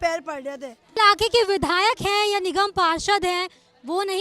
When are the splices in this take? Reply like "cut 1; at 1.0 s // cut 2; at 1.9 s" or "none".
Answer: cut 1; at 1.0 s